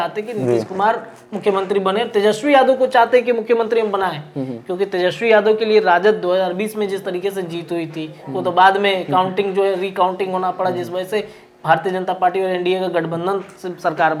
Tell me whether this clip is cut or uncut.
uncut